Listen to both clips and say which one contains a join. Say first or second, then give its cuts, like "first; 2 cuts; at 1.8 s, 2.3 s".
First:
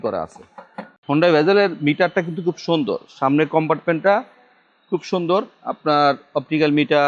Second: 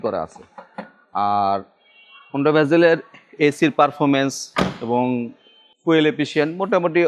first; 1 cut; at 0.9 s